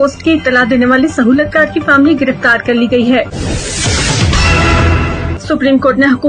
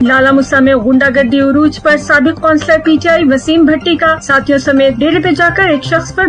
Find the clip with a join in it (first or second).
first